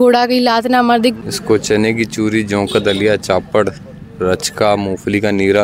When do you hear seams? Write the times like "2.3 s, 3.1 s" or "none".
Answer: 1.2 s